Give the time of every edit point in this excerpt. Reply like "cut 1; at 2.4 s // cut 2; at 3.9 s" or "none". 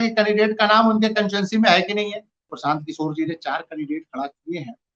cut 1; at 2.5 s